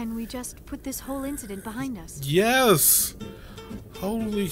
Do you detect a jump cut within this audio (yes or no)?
no